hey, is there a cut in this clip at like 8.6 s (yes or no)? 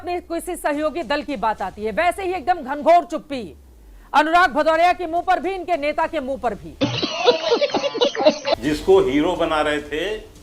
yes